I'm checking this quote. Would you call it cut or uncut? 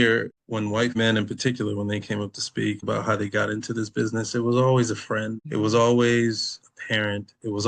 cut